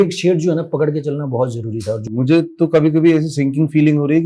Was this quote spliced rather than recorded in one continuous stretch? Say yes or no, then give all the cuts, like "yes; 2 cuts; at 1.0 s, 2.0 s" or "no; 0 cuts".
yes; 1 cut; at 1.9 s